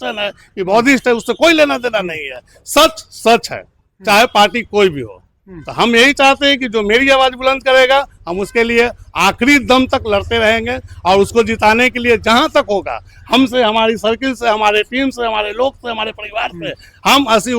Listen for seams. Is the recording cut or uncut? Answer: uncut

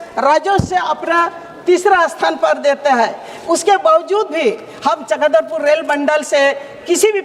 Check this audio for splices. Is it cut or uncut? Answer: uncut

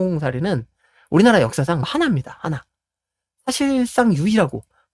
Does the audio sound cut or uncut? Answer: cut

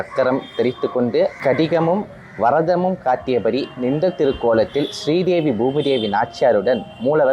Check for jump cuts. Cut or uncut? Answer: cut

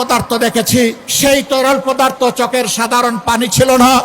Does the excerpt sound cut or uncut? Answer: cut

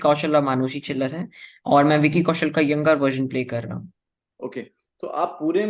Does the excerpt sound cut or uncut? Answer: uncut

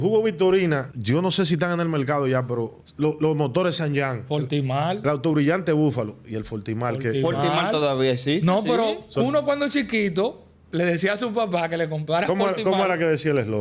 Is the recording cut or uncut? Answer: cut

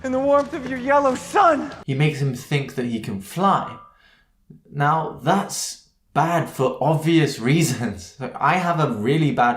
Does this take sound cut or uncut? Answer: cut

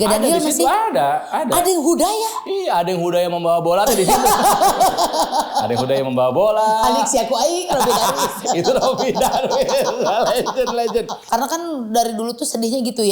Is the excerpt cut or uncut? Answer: cut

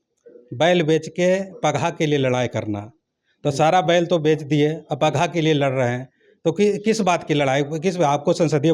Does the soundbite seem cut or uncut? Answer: uncut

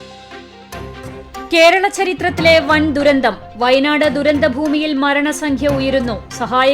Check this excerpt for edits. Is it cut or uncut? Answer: cut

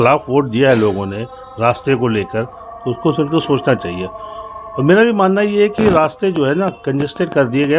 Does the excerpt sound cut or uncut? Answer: uncut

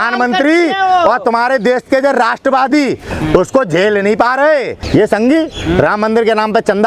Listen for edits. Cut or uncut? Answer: cut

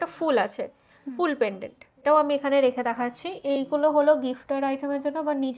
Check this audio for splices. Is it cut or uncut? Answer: cut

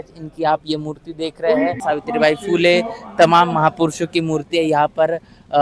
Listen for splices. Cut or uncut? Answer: cut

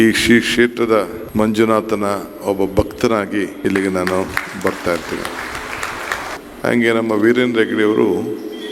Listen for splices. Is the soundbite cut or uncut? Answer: cut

